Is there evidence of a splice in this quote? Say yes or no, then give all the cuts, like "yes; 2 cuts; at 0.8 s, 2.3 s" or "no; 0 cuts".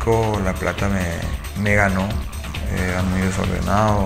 yes; 1 cut; at 2.1 s